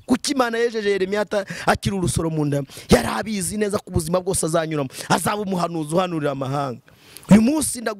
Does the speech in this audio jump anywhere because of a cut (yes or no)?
no